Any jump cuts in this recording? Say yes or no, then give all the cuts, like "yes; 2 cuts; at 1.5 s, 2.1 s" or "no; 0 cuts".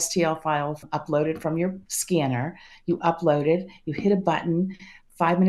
yes; 2 cuts; at 0.8 s, 1.9 s